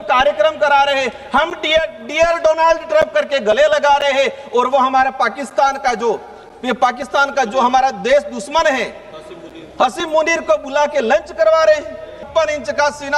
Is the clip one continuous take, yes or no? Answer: no